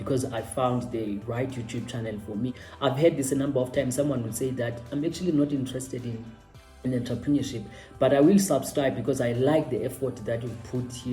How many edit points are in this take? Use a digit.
1